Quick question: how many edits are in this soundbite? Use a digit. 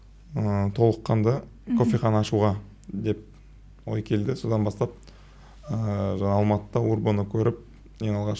0